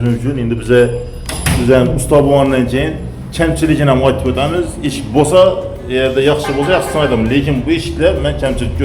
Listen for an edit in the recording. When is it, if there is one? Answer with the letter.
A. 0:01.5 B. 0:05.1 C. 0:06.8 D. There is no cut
D